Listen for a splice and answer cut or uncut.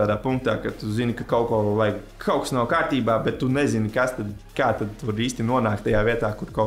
uncut